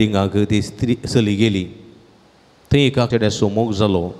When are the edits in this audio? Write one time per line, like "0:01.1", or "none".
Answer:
0:03.1